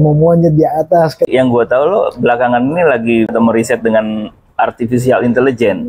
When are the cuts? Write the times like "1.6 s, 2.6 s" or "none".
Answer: 1.3 s, 3.3 s